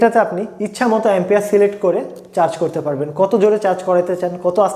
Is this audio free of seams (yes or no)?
yes